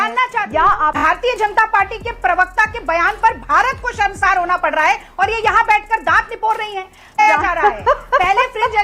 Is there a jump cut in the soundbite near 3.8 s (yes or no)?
no